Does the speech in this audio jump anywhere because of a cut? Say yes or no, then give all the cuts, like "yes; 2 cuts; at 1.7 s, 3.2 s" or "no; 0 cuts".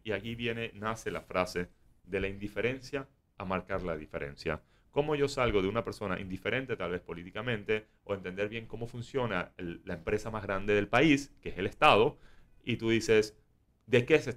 no; 0 cuts